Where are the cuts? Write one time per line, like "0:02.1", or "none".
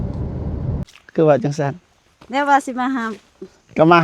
0:00.9